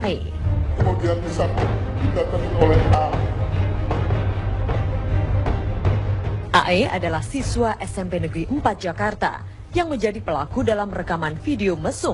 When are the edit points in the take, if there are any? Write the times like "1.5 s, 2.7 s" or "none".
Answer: none